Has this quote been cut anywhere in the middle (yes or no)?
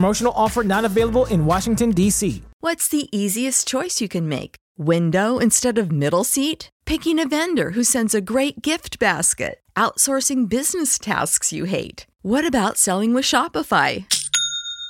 yes